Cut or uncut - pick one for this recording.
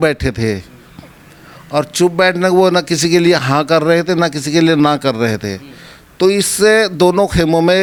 uncut